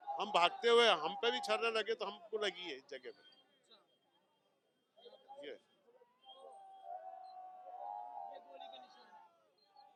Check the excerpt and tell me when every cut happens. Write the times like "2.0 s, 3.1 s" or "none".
none